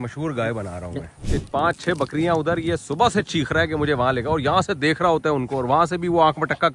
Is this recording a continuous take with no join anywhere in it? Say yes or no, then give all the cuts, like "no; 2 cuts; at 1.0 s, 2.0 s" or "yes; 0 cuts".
no; 1 cut; at 1.2 s